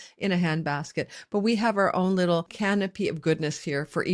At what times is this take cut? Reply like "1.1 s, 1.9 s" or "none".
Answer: 2.5 s